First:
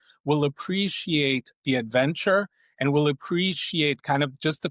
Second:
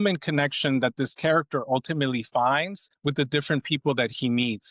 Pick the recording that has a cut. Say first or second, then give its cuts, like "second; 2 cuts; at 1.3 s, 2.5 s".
second; 1 cut; at 2.8 s